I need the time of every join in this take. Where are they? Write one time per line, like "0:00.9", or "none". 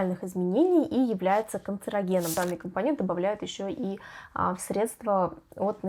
0:02.3